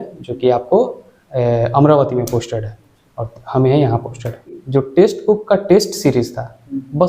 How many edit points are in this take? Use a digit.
1